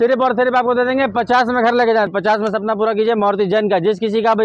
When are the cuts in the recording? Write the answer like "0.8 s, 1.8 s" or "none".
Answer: 2.1 s